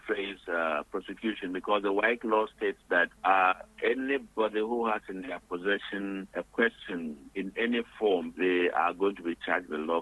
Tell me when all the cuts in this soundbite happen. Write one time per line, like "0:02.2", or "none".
0:06.3
0:08.3